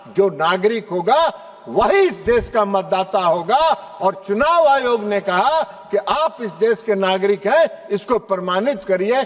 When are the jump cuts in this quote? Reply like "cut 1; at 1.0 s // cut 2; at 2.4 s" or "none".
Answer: none